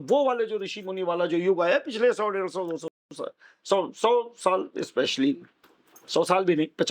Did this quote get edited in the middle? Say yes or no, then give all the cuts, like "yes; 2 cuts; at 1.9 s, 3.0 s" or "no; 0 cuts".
no; 0 cuts